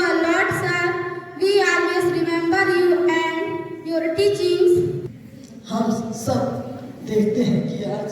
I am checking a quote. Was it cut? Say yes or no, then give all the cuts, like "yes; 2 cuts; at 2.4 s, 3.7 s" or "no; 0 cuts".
yes; 1 cut; at 5.0 s